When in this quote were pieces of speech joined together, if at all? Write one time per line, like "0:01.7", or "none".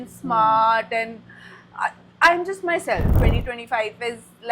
0:03.1